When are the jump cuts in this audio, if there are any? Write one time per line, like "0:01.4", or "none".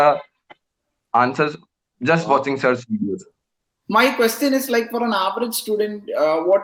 none